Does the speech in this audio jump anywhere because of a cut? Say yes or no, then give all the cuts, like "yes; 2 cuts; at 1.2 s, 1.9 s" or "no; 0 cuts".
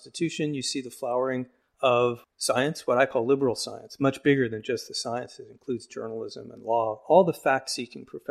yes; 2 cuts; at 1.6 s, 2.3 s